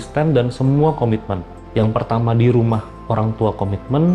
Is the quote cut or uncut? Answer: cut